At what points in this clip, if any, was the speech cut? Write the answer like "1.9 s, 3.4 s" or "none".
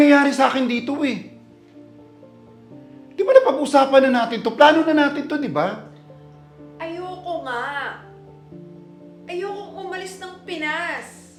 none

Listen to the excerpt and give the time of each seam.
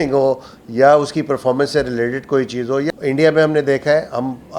2.9 s

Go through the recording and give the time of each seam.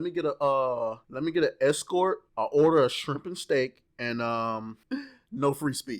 1.0 s, 2.3 s, 3.9 s, 4.8 s

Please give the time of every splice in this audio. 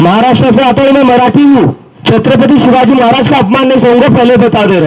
1.9 s

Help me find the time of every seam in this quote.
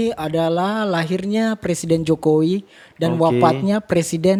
none

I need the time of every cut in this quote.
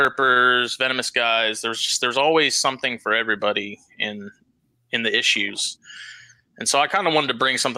none

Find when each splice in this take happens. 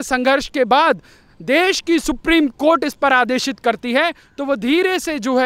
none

